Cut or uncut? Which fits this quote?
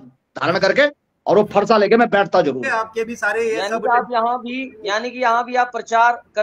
cut